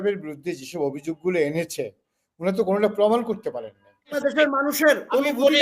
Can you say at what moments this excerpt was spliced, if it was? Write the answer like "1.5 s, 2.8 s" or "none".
4.2 s